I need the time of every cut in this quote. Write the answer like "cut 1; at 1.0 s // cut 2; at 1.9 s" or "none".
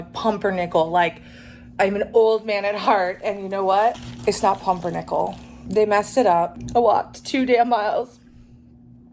cut 1; at 4.1 s // cut 2; at 5.5 s // cut 3; at 6.6 s